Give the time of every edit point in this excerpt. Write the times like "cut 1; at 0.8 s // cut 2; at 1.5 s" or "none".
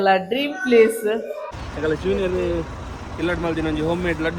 cut 1; at 1.5 s